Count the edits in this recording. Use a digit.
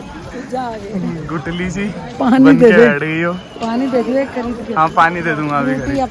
0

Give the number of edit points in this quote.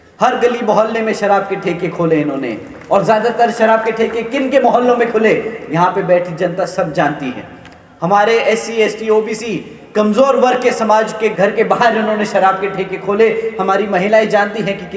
0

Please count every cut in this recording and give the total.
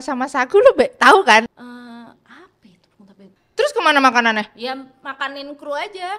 2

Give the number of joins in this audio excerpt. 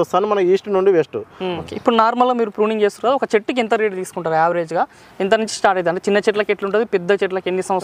1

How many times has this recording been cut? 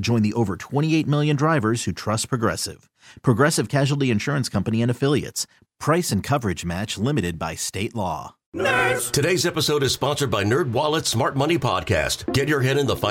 1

